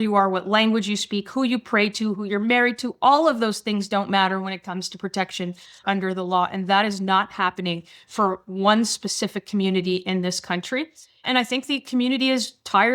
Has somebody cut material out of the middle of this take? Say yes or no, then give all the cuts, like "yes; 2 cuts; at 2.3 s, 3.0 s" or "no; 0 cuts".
yes; 1 cut; at 11.3 s